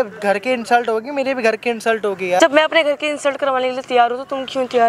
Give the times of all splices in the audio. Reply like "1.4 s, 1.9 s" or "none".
2.4 s